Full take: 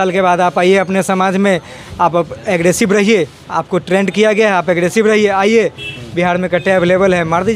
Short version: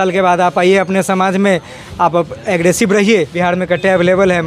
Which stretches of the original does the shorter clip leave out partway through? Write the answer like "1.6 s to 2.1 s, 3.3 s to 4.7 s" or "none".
3.3 s to 6.1 s